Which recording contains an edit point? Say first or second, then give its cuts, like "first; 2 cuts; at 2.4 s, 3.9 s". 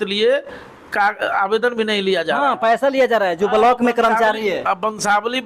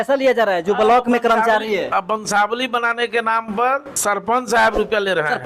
second; 1 cut; at 4.0 s